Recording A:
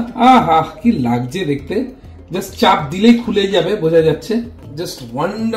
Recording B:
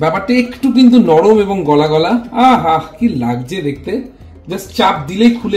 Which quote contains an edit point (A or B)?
A